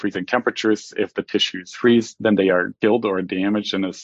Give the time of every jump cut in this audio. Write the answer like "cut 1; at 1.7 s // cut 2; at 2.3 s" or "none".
none